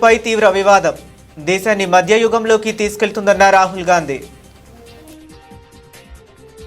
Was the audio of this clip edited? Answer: yes; 1 cut; at 4.5 s

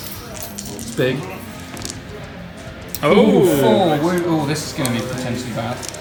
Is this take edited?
no; 0 cuts

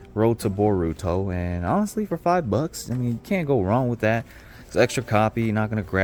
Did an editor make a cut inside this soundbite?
no; 0 cuts

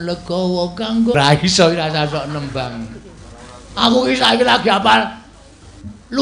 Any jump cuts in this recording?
yes; 1 cut; at 1.1 s

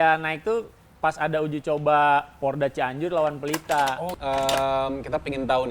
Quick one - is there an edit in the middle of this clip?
yes; 1 cut; at 4.1 s

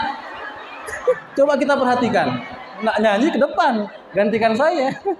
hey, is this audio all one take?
no; 2 cuts; at 1.2 s, 2.8 s

